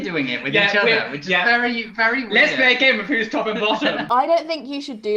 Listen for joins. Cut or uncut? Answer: cut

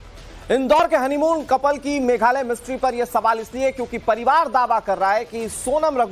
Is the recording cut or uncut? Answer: cut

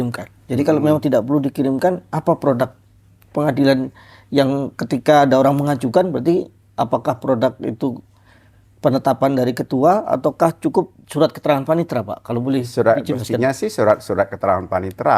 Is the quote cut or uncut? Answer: uncut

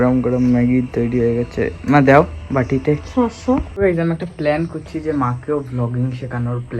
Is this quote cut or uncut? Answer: cut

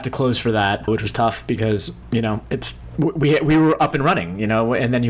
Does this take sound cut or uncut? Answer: cut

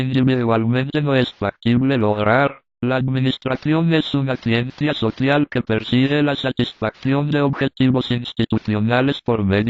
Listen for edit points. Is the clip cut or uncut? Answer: cut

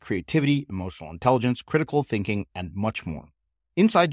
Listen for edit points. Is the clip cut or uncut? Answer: uncut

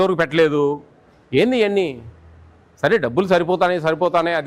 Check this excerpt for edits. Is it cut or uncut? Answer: uncut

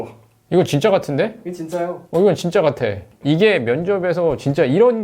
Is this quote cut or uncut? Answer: cut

